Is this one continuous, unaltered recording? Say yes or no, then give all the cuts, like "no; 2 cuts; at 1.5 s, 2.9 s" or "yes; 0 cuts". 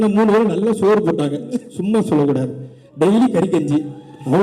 yes; 0 cuts